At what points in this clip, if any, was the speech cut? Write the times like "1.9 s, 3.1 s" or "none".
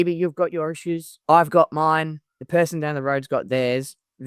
1.1 s